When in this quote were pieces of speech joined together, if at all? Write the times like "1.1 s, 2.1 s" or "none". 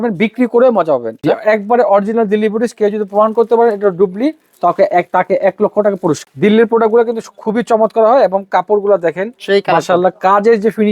1.1 s, 6.3 s